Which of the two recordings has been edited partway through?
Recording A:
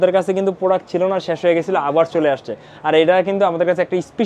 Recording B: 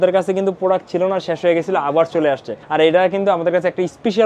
B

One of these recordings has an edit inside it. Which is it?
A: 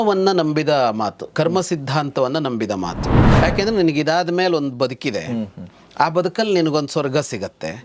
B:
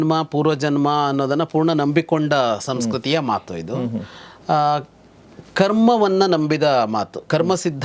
A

